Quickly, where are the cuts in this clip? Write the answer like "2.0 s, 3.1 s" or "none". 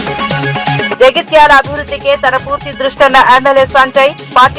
1.0 s